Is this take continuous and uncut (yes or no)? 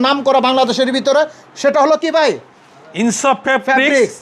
yes